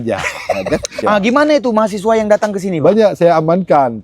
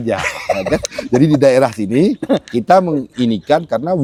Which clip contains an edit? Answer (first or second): first